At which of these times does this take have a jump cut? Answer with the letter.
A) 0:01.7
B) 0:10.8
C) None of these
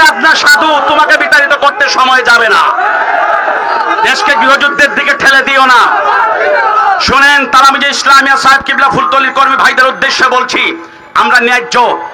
C